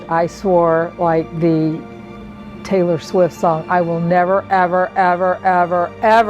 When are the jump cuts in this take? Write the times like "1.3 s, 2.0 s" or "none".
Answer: none

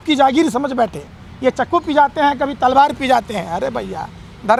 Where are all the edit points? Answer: none

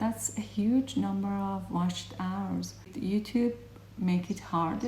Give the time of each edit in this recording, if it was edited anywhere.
2.9 s

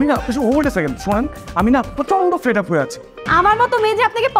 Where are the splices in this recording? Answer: 3.2 s

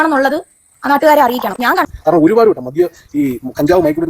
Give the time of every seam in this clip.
1.9 s

